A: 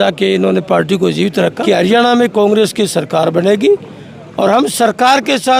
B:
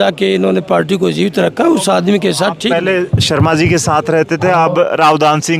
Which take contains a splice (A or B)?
A